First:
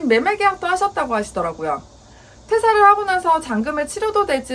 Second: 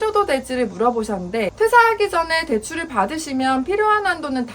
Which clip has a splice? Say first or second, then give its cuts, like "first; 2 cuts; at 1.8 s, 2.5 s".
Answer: second; 1 cut; at 1.5 s